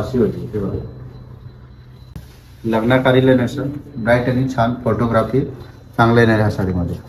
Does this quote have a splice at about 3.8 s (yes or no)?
no